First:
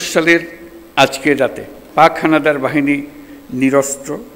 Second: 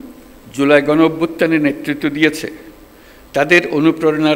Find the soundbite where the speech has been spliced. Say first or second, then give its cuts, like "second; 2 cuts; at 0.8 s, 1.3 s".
first; 1 cut; at 1.8 s